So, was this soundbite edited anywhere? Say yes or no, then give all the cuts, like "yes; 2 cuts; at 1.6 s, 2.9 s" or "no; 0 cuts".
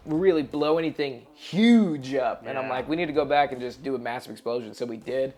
no; 0 cuts